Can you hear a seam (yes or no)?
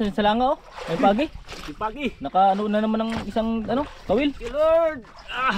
no